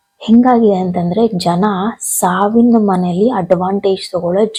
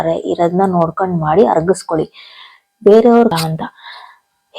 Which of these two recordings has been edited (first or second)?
second